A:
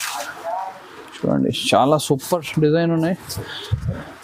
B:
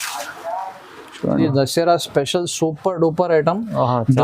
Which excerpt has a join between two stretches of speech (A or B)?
B